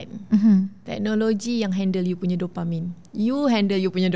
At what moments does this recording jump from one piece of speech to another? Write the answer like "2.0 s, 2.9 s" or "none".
none